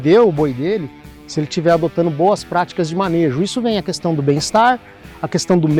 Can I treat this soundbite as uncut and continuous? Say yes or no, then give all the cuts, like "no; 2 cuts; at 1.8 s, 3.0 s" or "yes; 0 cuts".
yes; 0 cuts